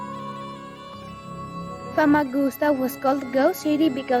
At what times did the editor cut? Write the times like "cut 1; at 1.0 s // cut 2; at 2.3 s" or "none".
cut 1; at 0.9 s